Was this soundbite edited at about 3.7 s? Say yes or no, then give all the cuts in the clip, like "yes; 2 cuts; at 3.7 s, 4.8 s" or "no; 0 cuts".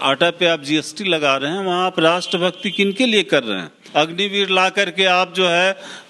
yes; 1 cut; at 3.7 s